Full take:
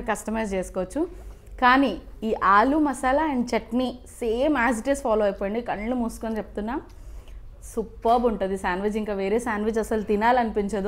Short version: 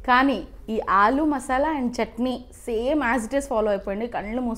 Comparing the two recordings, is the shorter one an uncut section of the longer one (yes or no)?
yes